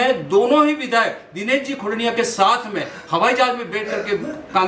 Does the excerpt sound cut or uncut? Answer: uncut